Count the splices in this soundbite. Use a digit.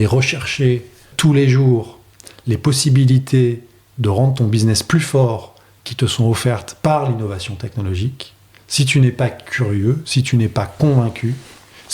1